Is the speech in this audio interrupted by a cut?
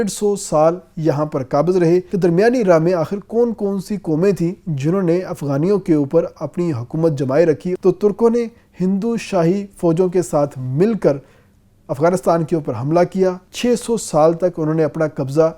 yes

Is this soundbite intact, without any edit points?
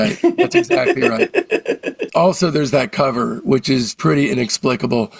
no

